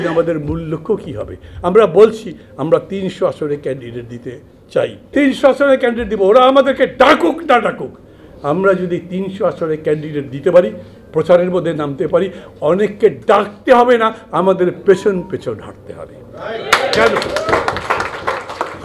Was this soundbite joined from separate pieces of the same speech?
yes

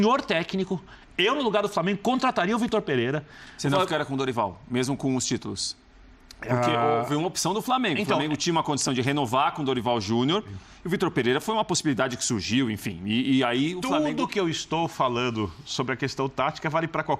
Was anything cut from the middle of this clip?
no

